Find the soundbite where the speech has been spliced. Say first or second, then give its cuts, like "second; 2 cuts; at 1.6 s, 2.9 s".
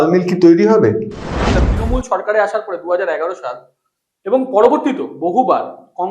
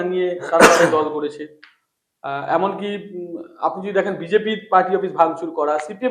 first; 1 cut; at 1.5 s